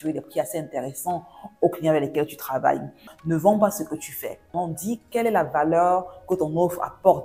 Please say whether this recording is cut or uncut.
cut